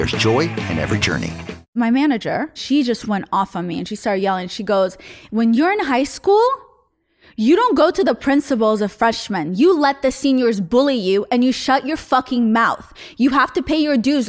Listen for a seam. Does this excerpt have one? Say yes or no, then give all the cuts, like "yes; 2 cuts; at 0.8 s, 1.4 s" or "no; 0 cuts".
yes; 2 cuts; at 1.7 s, 2.6 s